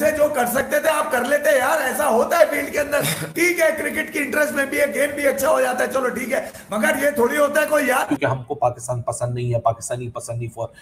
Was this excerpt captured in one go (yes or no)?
no